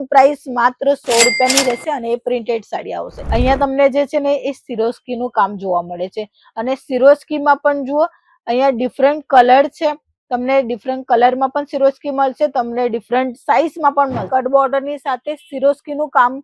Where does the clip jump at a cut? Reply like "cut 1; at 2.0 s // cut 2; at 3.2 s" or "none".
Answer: cut 1; at 3.1 s // cut 2; at 14.3 s

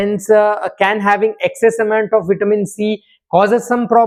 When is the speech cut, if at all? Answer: none

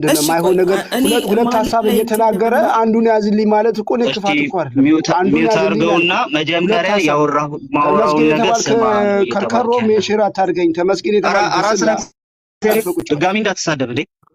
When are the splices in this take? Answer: none

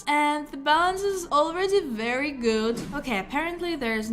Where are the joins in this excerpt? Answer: cut 1; at 2.9 s

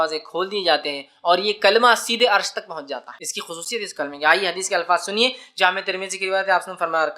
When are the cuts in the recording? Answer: cut 1; at 3.6 s

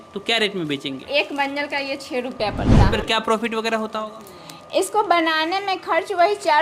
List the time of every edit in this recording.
cut 1; at 1.0 s // cut 2; at 2.9 s

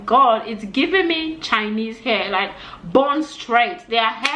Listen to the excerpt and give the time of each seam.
none

